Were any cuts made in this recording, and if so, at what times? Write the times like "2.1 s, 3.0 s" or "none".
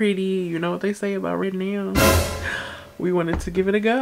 none